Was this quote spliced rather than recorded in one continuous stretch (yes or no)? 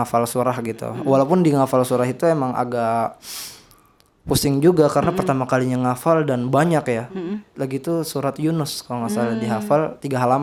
no